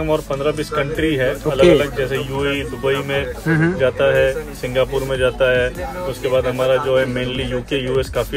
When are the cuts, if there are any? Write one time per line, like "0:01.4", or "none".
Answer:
none